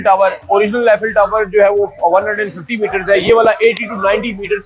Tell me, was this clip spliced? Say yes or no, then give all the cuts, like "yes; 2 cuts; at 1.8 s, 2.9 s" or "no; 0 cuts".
no; 0 cuts